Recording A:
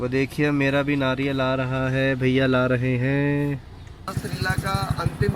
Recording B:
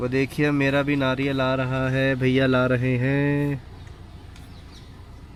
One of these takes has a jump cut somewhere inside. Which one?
A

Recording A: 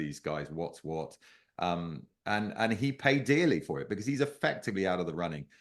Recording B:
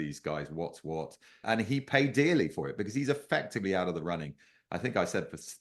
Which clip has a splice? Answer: B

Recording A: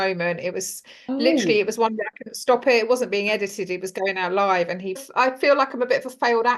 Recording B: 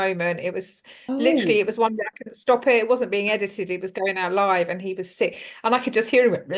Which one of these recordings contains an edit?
A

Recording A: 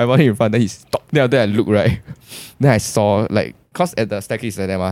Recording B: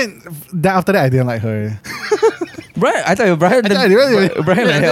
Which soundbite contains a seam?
A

